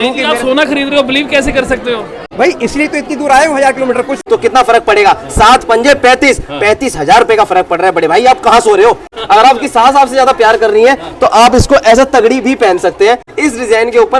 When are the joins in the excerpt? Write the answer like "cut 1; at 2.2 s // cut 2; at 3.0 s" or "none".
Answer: cut 1; at 2.2 s // cut 2; at 4.2 s // cut 3; at 9.2 s // cut 4; at 13.3 s